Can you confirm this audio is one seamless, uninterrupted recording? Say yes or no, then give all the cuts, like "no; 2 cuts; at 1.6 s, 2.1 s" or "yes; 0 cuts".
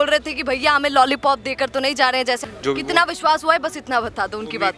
no; 1 cut; at 2.4 s